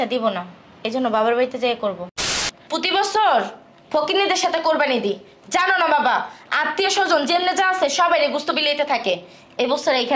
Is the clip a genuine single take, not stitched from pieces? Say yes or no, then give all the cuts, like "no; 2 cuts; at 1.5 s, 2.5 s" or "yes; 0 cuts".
no; 1 cut; at 2.2 s